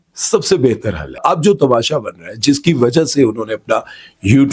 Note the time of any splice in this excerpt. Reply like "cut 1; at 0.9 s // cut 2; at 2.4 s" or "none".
cut 1; at 1.2 s

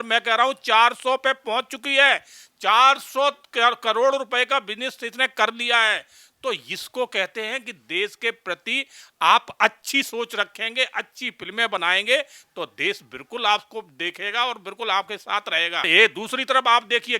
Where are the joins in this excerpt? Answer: cut 1; at 15.9 s

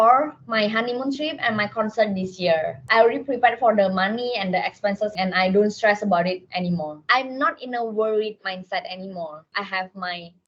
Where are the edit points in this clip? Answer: cut 1; at 2.9 s // cut 2; at 5.1 s // cut 3; at 7.0 s // cut 4; at 9.4 s

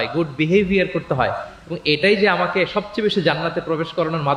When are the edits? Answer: none

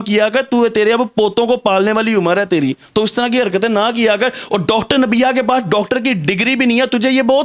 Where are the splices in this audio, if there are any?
none

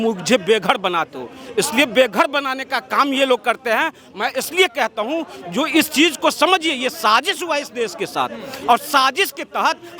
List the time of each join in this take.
none

